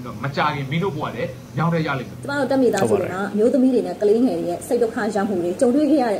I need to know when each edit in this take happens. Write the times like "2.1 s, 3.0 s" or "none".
2.3 s